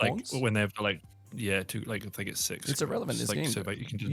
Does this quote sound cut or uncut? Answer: uncut